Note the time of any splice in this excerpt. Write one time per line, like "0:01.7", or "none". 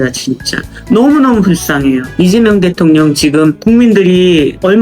0:03.6